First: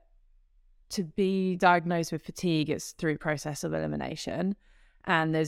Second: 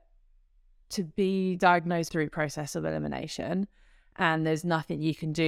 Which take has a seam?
second; 1 cut; at 2.1 s

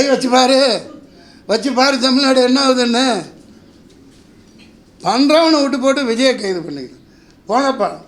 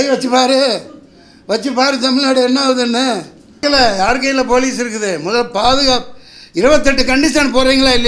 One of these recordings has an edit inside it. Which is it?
second; 1 cut; at 3.4 s

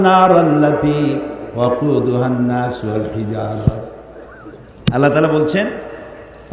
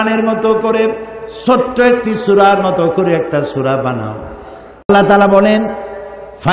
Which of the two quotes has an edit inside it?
second; 1 cut; at 4.9 s

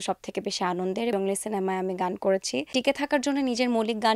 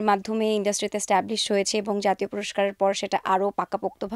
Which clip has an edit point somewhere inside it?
first; 2 cuts; at 1.1 s, 2.7 s

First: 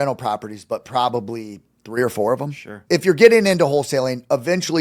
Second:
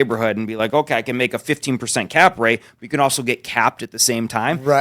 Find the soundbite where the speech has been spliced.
first; 1 cut; at 2.8 s

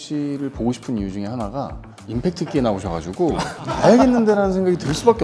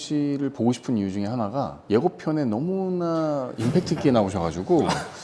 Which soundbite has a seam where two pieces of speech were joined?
first; 2 cuts; at 1.9 s, 3.7 s

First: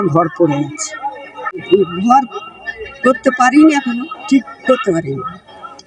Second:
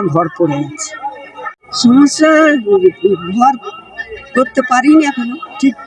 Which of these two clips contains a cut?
first; 1 cut; at 1.7 s

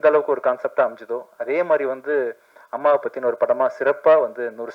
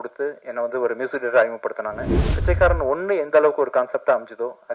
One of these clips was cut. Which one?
second; 1 cut; at 2.4 s

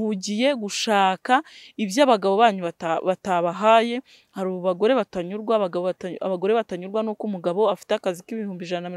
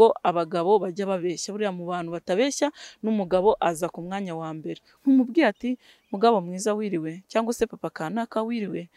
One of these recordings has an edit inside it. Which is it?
second; 1 cut; at 4.9 s

